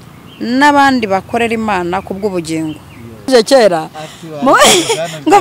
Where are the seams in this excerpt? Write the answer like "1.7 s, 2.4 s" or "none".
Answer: 3.3 s